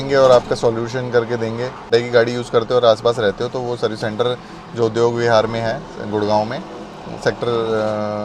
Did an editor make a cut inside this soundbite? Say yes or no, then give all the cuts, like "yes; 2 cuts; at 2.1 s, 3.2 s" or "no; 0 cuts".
no; 0 cuts